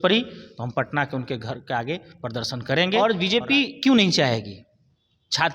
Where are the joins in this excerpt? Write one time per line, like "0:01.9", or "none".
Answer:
0:03.0

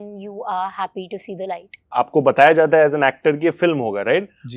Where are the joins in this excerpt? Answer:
0:01.8

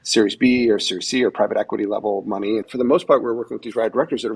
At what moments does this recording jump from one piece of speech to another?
0:02.7

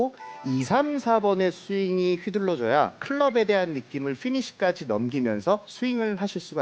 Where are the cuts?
0:03.0
0:05.7

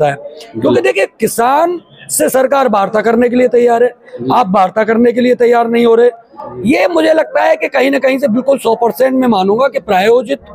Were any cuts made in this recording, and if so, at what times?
0:06.3

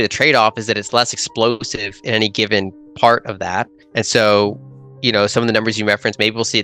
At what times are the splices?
0:03.8

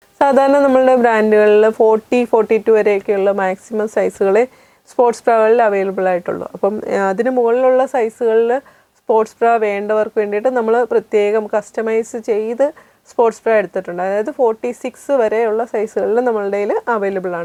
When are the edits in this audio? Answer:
none

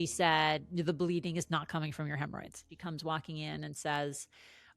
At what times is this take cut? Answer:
0:02.7

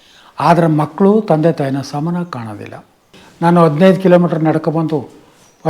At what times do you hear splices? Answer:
0:03.2

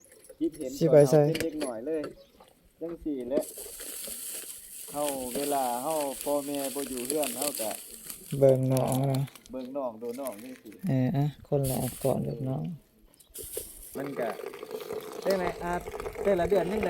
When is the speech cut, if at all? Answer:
0:13.9

